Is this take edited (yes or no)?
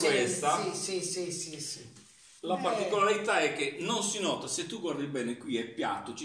no